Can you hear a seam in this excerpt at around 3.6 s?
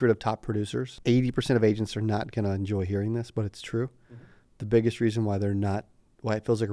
no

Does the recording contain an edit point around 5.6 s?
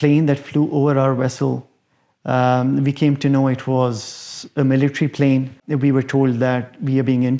yes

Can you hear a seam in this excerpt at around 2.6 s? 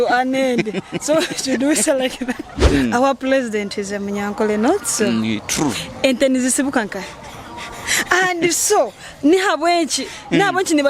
yes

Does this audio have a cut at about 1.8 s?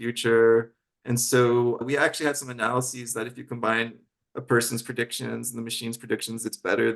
yes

